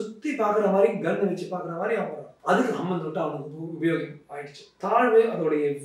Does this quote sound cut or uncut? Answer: cut